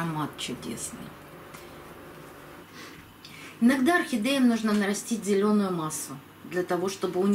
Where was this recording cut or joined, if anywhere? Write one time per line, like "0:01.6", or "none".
0:02.6